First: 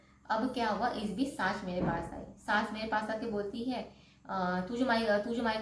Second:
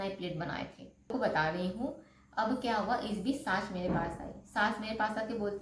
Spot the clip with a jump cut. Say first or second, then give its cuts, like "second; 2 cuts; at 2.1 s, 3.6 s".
second; 1 cut; at 1.0 s